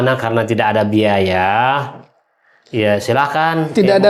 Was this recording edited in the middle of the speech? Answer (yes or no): no